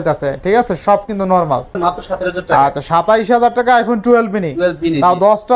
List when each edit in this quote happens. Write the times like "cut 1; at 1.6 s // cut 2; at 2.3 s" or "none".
cut 1; at 1.8 s